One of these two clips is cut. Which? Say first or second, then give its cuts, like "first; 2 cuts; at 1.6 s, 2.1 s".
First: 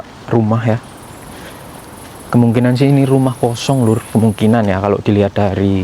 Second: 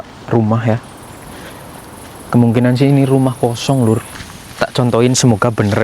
second; 1 cut; at 4.1 s